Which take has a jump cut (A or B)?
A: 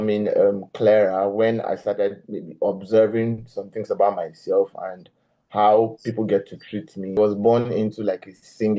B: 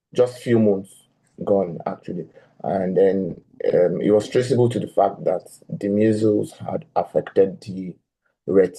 A